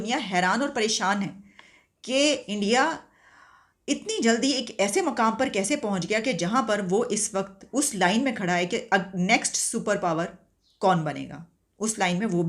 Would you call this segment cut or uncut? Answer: uncut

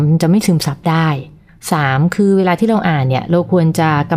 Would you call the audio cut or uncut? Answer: uncut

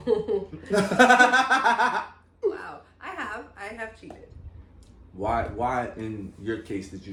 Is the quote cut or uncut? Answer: uncut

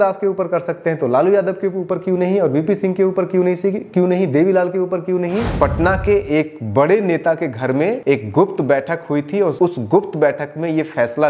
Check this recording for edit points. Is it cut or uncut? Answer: cut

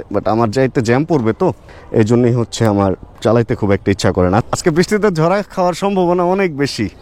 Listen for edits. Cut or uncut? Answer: cut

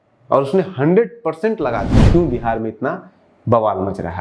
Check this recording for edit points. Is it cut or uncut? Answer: cut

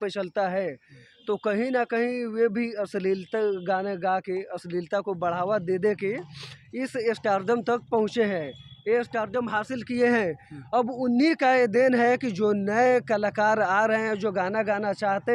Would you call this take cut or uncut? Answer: uncut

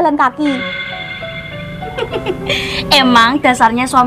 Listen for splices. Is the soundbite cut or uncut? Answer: uncut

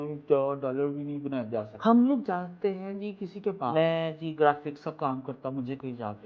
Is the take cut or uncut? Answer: cut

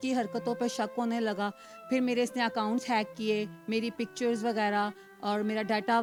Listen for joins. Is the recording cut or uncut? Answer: uncut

